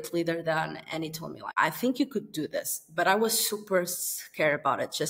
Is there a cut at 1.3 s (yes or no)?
yes